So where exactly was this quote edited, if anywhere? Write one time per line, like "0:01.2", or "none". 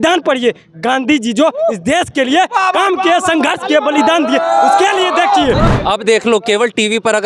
0:05.7